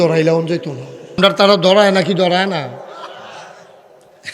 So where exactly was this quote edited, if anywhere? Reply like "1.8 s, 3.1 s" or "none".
1.2 s